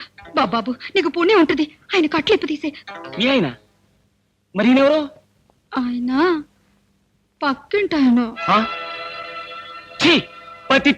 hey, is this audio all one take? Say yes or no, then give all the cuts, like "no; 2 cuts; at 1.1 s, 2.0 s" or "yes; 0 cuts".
yes; 0 cuts